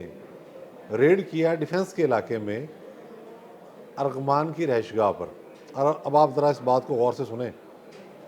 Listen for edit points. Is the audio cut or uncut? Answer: uncut